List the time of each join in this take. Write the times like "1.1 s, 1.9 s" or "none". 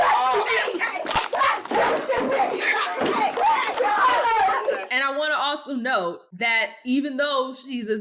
4.9 s, 6.3 s